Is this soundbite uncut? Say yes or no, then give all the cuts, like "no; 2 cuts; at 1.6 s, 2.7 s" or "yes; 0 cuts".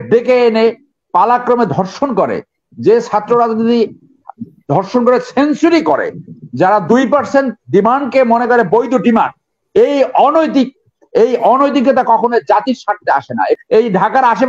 no; 1 cut; at 13.6 s